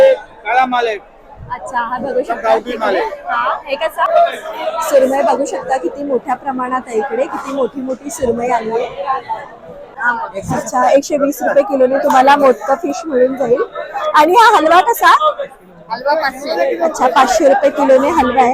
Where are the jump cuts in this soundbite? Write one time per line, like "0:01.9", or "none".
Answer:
0:04.1
0:10.0

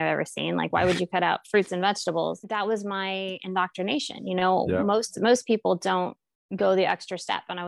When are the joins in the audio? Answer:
0:02.4

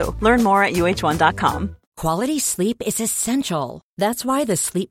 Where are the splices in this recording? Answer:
0:01.8

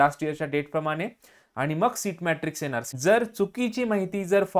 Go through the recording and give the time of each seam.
0:02.9

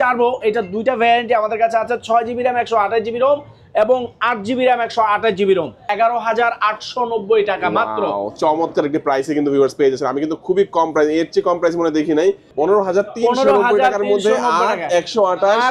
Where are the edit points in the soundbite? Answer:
0:05.9
0:12.5

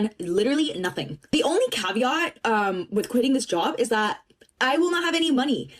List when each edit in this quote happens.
none

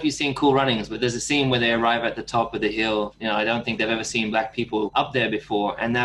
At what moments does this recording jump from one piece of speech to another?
0:00.9
0:03.1
0:04.9

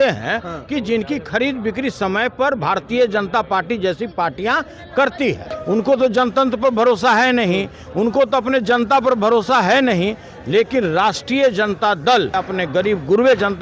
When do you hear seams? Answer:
0:05.5
0:12.4

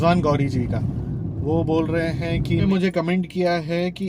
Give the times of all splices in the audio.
0:02.6

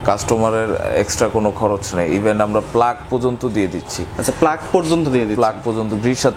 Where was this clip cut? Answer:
none

